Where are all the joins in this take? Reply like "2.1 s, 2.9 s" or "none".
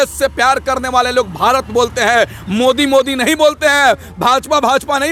none

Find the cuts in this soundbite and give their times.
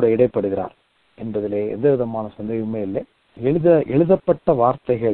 3.2 s

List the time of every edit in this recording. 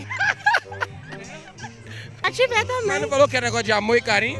2.2 s

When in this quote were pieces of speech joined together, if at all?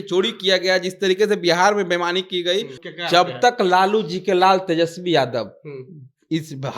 2.8 s

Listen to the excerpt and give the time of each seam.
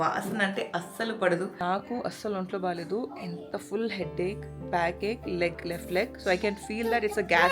1.6 s

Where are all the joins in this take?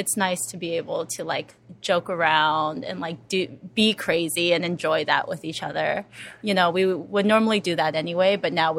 none

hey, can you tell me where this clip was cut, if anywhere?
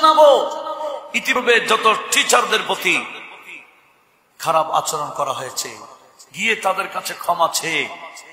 1.3 s

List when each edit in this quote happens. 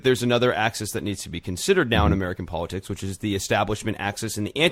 none

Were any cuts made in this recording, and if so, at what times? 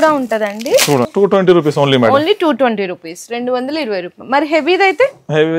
1.1 s

